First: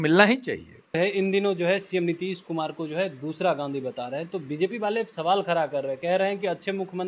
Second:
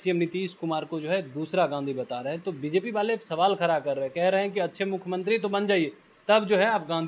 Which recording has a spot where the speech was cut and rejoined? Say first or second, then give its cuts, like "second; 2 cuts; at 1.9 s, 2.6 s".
first; 1 cut; at 1.0 s